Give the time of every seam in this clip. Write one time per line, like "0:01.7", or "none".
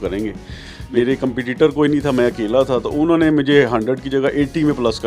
0:01.0